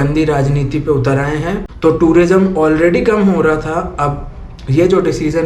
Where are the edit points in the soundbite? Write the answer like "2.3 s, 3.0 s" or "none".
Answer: 1.7 s